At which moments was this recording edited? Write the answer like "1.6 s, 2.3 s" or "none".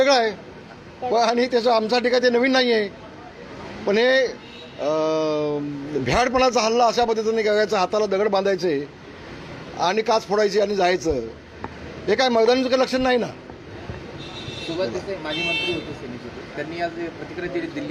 none